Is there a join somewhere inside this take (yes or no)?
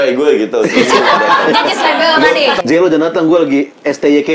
yes